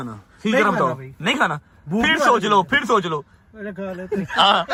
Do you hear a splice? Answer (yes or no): no